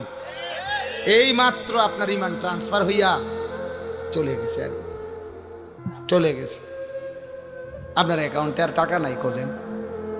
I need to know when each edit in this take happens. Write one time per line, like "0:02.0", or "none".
0:09.2

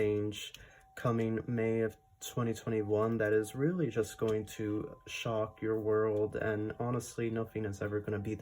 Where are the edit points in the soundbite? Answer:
none

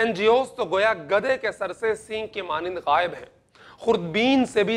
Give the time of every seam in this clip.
none

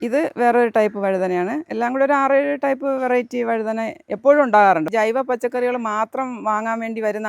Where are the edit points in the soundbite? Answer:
0:04.9

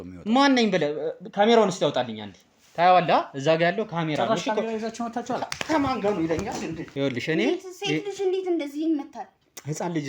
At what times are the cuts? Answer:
0:06.8

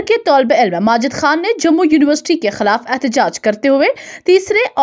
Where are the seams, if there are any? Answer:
none

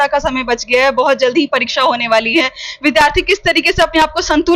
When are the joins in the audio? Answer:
none

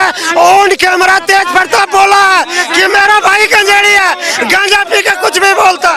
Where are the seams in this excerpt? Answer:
none

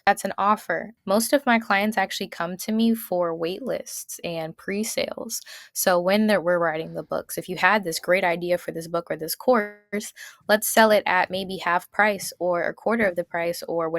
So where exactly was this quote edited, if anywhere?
0:00.9

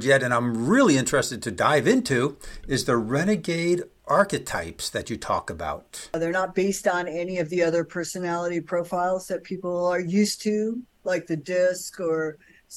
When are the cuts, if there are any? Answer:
0:06.1

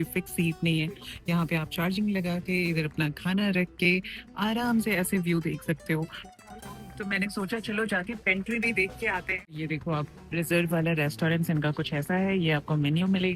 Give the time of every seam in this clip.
0:09.5

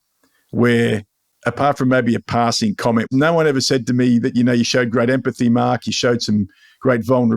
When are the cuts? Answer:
0:03.1

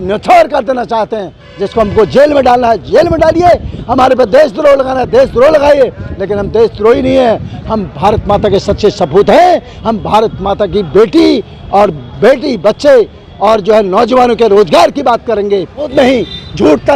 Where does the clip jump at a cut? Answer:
0:15.9

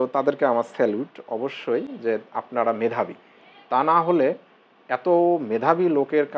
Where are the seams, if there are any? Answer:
0:01.2

